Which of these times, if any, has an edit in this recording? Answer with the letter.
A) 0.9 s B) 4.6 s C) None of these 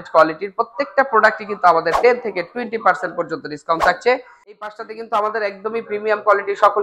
B